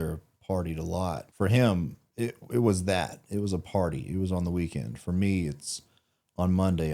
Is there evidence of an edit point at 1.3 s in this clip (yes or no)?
yes